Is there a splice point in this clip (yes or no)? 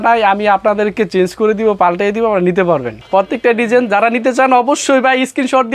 yes